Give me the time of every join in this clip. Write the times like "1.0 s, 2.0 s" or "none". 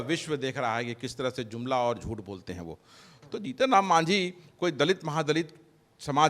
3.1 s